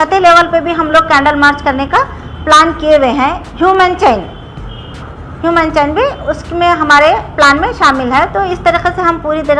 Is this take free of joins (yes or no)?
yes